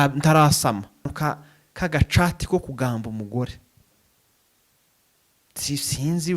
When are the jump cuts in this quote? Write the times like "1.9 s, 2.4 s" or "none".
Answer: 1.1 s